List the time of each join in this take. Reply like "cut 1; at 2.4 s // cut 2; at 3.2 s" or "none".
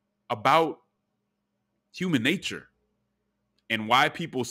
none

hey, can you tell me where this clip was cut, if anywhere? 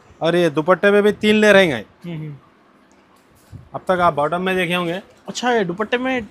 none

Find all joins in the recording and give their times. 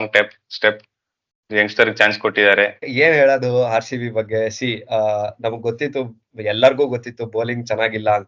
cut 1; at 2.9 s

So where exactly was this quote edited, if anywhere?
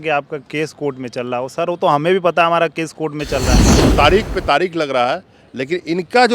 cut 1; at 3.7 s

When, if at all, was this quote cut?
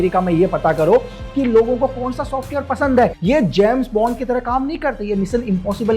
cut 1; at 3.2 s

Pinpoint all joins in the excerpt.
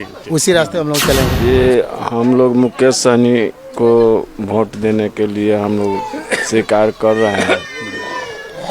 cut 1; at 1.3 s

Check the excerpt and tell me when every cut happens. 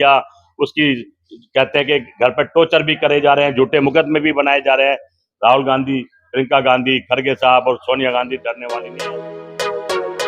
cut 1; at 8.8 s

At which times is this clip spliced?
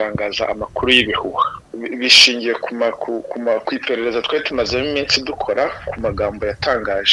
cut 1; at 1.7 s

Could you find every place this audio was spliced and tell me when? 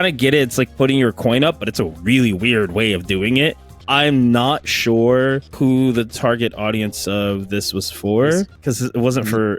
cut 1; at 3.7 s // cut 2; at 5.5 s // cut 3; at 8.5 s

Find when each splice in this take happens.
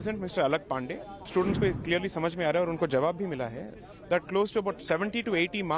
cut 1; at 1.3 s

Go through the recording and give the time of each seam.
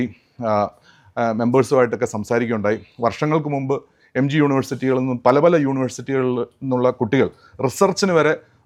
none

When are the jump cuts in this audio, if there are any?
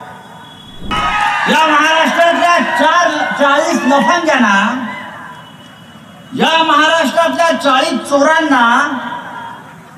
cut 1; at 0.9 s

